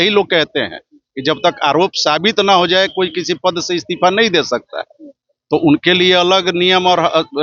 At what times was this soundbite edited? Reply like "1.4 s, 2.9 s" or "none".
none